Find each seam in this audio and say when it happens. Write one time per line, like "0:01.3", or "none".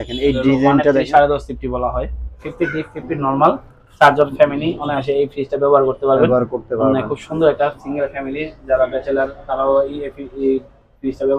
0:02.5